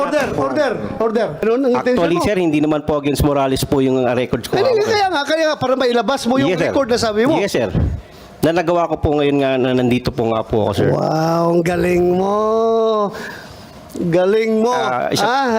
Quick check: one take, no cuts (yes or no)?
no